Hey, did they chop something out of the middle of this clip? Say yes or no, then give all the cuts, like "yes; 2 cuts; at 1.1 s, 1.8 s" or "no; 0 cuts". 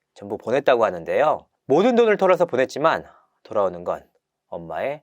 yes; 1 cut; at 1.5 s